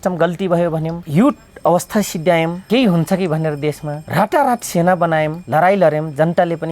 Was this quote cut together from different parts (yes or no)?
yes